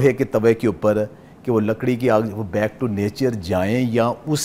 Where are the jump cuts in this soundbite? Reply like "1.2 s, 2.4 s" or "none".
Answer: none

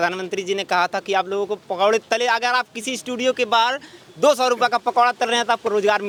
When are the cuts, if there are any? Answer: none

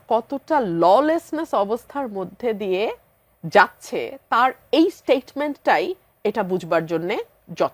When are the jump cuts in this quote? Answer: none

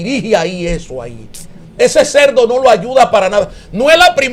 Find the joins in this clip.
none

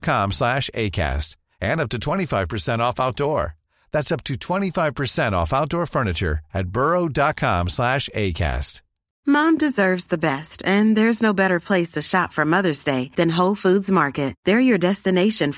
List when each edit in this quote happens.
9.1 s

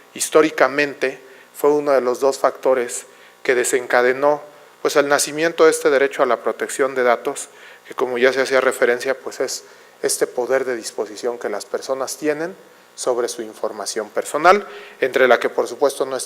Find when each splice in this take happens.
15.1 s

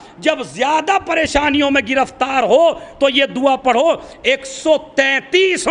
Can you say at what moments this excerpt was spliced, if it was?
none

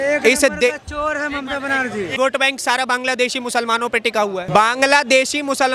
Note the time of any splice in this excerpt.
2.1 s, 4.5 s

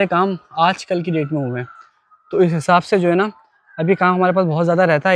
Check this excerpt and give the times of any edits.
none

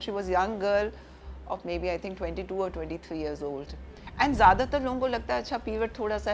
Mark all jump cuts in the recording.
3.8 s

